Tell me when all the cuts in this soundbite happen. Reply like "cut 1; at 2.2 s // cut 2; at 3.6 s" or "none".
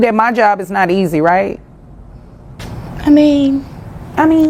none